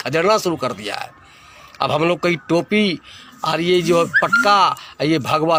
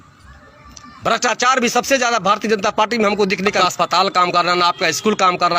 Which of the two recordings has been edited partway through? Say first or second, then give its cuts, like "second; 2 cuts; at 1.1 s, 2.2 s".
second; 1 cut; at 3.5 s